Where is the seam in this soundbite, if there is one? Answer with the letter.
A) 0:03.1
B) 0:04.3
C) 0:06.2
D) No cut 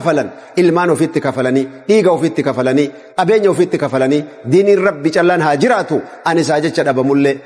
D